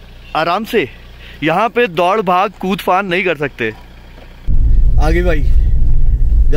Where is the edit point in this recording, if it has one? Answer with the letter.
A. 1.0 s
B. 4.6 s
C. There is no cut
B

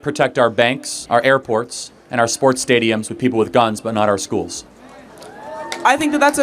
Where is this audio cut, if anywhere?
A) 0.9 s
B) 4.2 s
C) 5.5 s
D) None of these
A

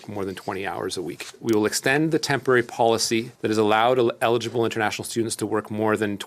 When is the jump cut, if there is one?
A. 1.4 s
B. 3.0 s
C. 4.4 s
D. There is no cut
A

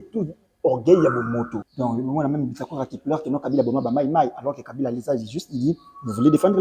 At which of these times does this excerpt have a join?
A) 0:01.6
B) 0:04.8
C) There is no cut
A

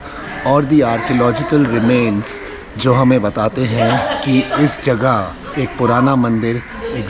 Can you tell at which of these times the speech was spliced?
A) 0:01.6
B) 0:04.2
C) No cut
C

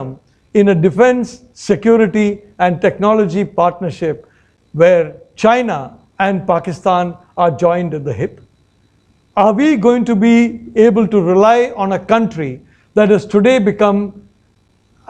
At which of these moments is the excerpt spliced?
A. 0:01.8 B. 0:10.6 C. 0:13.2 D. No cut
D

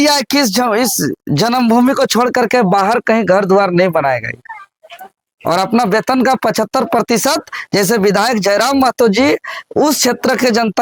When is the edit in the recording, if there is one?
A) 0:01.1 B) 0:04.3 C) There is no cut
C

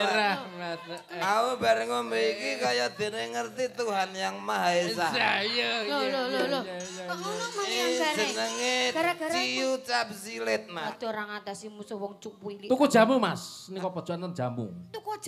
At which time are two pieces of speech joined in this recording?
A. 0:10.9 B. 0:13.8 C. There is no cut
A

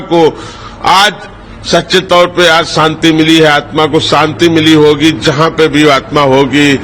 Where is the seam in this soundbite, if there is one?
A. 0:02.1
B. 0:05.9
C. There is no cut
C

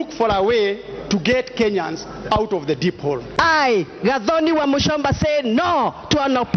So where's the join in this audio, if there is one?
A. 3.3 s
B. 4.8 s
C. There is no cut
A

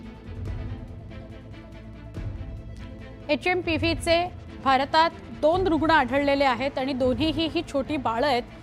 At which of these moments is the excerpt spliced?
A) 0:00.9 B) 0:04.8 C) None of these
A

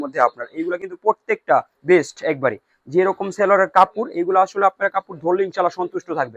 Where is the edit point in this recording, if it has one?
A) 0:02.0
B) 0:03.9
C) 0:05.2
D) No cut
D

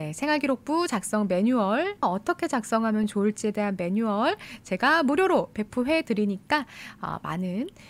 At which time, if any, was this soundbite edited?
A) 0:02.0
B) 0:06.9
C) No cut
A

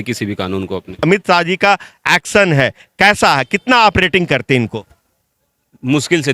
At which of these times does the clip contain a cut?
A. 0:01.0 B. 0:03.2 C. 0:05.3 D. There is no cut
A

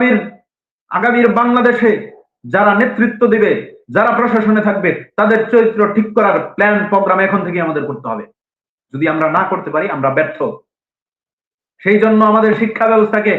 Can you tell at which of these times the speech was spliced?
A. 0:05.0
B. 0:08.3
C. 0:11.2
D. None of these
D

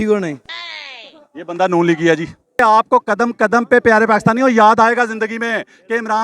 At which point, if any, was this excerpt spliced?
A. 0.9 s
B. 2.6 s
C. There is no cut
B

